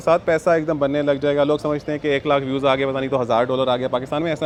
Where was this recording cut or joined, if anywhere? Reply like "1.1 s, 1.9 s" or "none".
none